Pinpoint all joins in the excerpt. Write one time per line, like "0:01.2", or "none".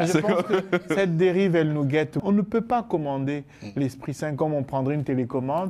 0:02.2